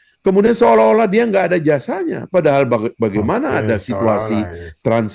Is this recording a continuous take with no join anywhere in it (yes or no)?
yes